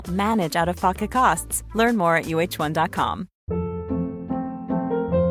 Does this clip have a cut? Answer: yes; 1 cut; at 3.3 s

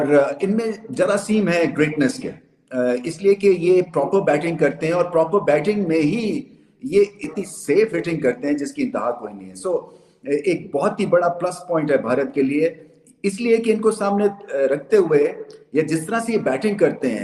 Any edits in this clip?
no; 0 cuts

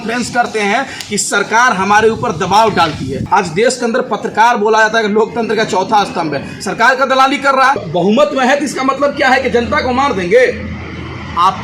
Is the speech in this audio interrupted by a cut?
yes; 2 cuts; at 3.2 s, 7.8 s

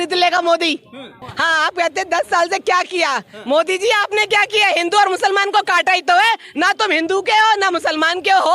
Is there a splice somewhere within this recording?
yes; 1 cut; at 1.1 s

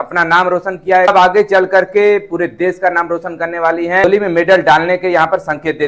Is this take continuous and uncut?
no; 2 cuts; at 1.1 s, 4.0 s

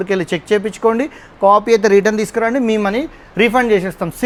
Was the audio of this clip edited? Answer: no; 0 cuts

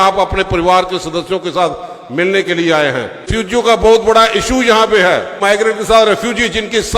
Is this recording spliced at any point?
yes; 2 cuts; at 3.3 s, 5.3 s

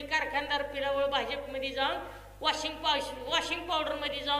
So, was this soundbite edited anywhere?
no; 0 cuts

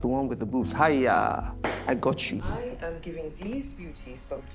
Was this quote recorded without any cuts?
no; 1 cut; at 2.5 s

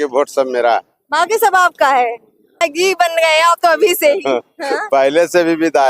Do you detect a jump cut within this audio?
yes; 1 cut; at 2.6 s

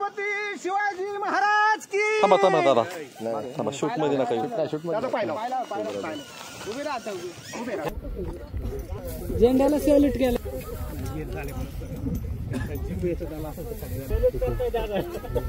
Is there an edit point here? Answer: no; 0 cuts

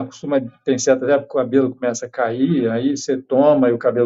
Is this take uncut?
yes; 0 cuts

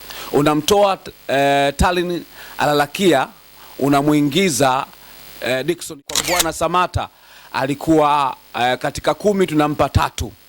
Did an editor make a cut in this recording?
yes; 1 cut; at 6.0 s

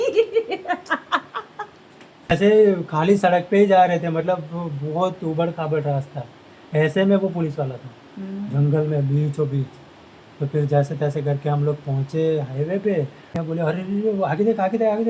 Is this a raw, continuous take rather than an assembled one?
no; 2 cuts; at 2.3 s, 13.3 s

